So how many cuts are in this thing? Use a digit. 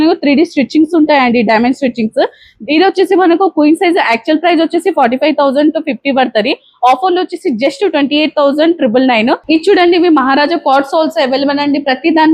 1